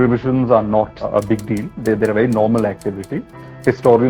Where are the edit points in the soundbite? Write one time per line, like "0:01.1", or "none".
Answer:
0:01.0